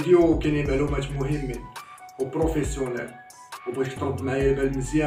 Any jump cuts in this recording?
no; 0 cuts

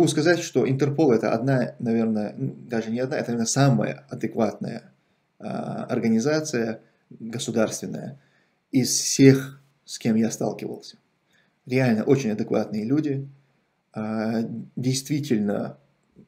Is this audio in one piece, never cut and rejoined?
yes; 0 cuts

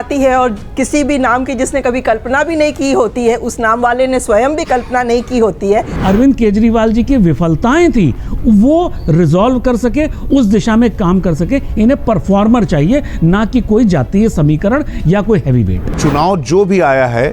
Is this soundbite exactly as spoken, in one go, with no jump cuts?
no; 2 cuts; at 5.9 s, 16.0 s

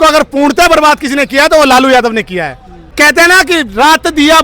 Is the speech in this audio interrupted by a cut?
yes; 1 cut; at 2.9 s

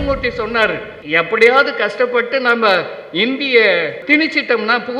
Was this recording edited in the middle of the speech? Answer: yes; 2 cuts; at 0.9 s, 4.0 s

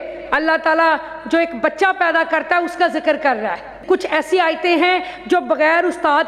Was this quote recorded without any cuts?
no; 1 cut; at 3.8 s

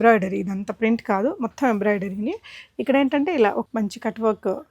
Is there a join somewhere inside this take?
yes; 1 cut; at 3.7 s

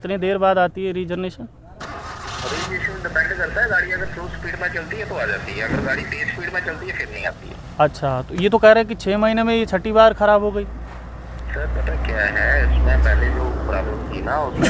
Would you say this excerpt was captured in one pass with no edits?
yes; 0 cuts

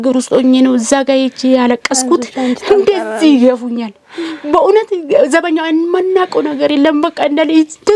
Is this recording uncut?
yes; 0 cuts

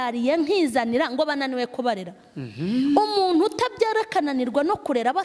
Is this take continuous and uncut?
yes; 0 cuts

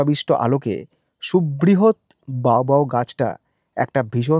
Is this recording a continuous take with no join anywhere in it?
yes; 0 cuts

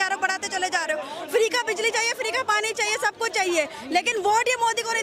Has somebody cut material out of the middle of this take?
no; 0 cuts

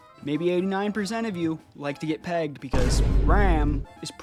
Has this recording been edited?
no; 0 cuts

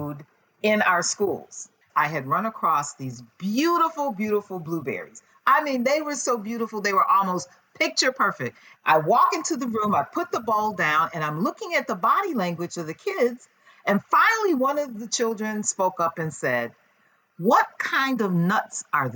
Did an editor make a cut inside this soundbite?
yes; 2 cuts; at 1.8 s, 8.6 s

